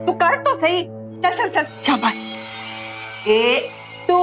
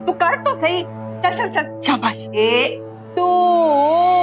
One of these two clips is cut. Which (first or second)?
second